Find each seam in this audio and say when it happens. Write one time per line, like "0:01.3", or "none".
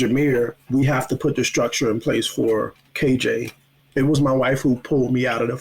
0:03.3